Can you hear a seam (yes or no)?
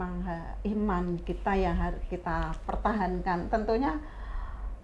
no